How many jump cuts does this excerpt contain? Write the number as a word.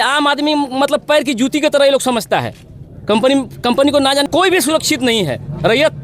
one